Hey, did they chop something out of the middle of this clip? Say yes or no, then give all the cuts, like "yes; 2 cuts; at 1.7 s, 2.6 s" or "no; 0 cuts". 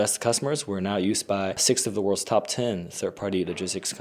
yes; 1 cut; at 1.6 s